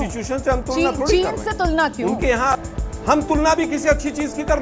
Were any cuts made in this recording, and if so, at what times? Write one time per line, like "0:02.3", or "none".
0:02.6